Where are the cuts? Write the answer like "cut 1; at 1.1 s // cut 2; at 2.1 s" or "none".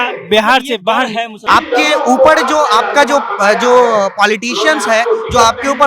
cut 1; at 1.4 s